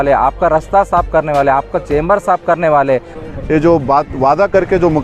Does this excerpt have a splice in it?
yes; 1 cut; at 3.2 s

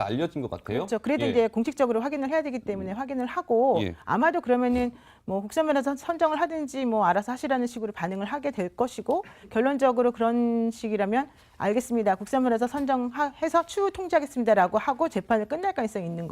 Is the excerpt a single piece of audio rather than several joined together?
no; 1 cut; at 14.1 s

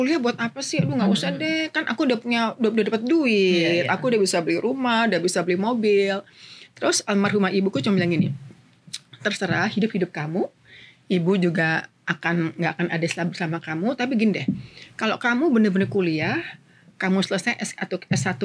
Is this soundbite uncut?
yes; 0 cuts

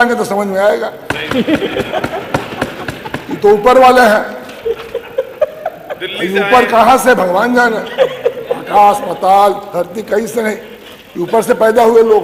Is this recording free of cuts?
yes; 0 cuts

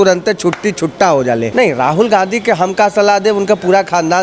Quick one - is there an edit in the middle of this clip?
yes; 1 cut; at 1.5 s

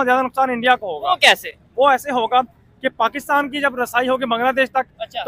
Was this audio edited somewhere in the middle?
no; 0 cuts

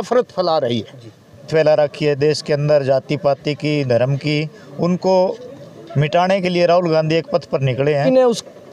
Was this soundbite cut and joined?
yes; 2 cuts; at 1.5 s, 8.0 s

